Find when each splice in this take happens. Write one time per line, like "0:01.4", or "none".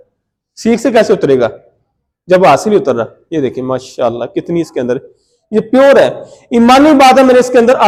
none